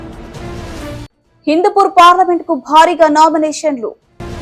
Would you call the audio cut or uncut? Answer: cut